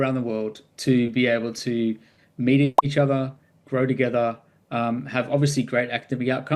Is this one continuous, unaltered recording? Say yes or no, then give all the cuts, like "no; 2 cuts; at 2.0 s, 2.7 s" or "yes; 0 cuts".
yes; 0 cuts